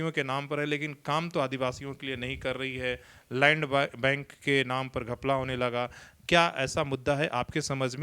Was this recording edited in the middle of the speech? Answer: no; 0 cuts

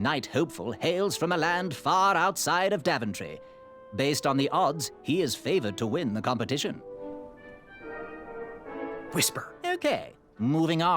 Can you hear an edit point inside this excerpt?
yes; 2 cuts; at 6.8 s, 9.3 s

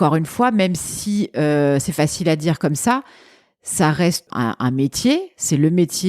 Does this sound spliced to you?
yes; 1 cut; at 4.3 s

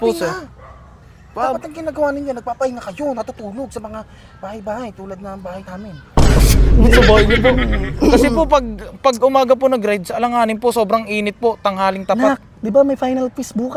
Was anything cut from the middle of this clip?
no; 0 cuts

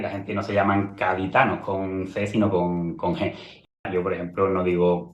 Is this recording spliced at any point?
yes; 1 cut; at 3.8 s

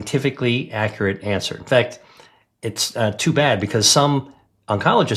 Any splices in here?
no; 0 cuts

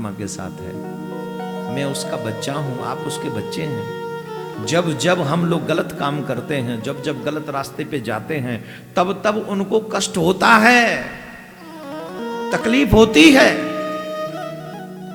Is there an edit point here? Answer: no; 0 cuts

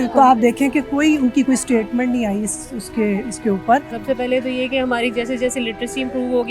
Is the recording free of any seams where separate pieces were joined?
no; 1 cut; at 3.9 s

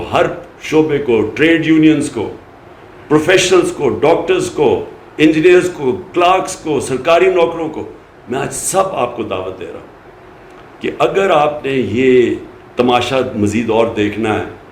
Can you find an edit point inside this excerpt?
no; 0 cuts

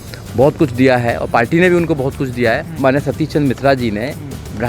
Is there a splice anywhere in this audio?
yes; 1 cut; at 2.8 s

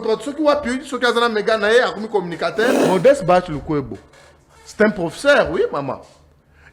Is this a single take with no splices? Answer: no; 1 cut; at 2.8 s

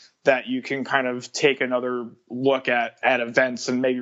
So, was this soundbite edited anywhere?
yes; 1 cut; at 3.0 s

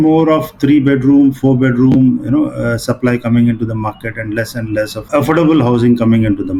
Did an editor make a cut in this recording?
no; 0 cuts

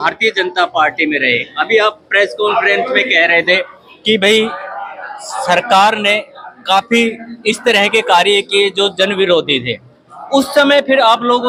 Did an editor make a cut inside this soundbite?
no; 0 cuts

